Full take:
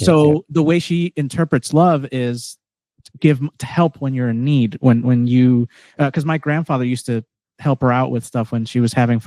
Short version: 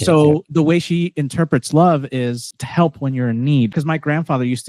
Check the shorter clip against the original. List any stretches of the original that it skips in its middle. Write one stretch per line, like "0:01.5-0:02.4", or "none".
0:02.6-0:03.6
0:04.8-0:06.1

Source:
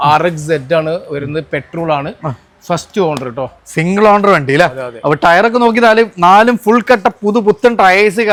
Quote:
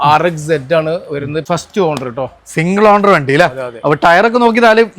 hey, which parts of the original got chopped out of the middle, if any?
0:01.5-0:02.7

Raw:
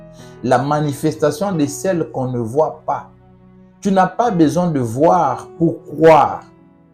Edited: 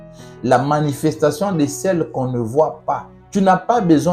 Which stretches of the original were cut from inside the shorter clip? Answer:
0:03.1-0:03.6

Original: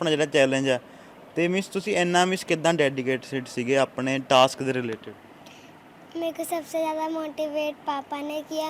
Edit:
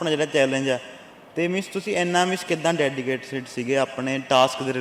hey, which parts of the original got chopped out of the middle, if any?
none

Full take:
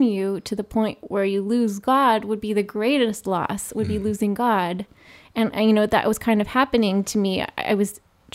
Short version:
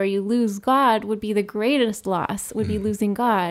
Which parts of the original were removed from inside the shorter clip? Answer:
none

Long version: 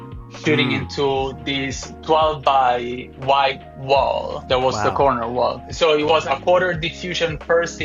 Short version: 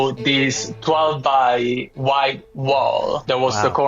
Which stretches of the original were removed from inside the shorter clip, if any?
none

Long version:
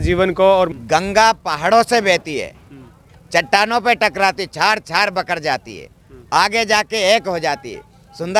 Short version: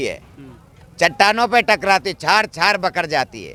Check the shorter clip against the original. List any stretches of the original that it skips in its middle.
none

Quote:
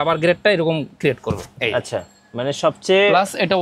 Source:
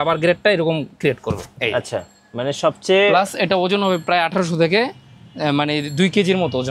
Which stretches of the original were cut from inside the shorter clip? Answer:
none

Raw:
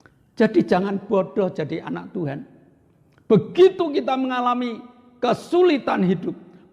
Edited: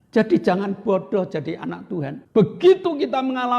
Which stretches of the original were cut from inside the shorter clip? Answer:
0:02.4-0:03.1

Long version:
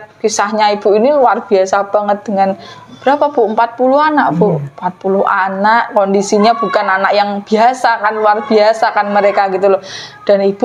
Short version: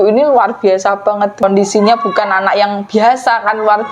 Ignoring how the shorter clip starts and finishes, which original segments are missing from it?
0:02.3-0:06.0

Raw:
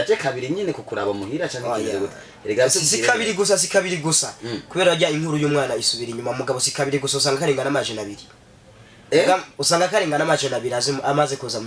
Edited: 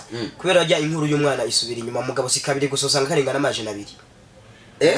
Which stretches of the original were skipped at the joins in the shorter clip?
none

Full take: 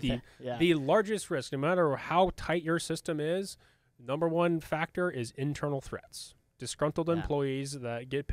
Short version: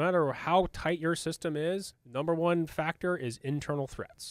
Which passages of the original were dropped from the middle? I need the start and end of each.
0:03.6-0:03.9

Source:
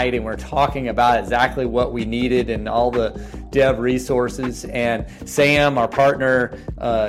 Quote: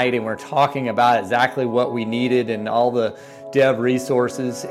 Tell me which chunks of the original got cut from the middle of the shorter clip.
none

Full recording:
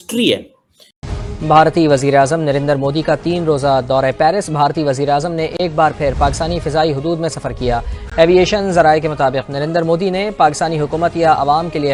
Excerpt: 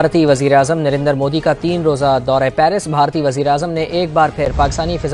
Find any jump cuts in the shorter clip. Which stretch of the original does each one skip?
none

